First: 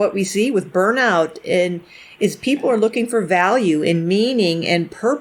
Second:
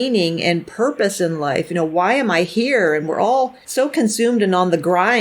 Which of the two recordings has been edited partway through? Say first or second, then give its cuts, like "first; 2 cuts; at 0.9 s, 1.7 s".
second; 1 cut; at 3.6 s